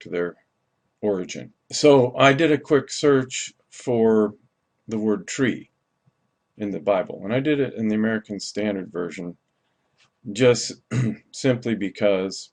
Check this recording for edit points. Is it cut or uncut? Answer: uncut